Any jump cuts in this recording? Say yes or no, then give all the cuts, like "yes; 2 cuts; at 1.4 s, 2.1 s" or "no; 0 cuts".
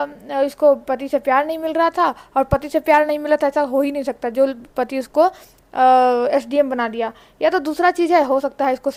no; 0 cuts